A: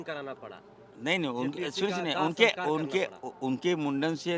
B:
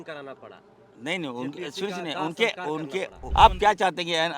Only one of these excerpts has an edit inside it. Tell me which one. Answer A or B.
B